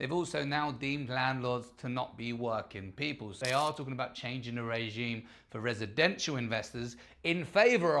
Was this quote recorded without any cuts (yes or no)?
no